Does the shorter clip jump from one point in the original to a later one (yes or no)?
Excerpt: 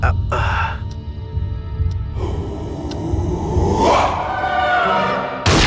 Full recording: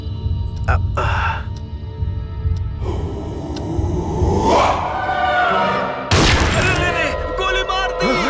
no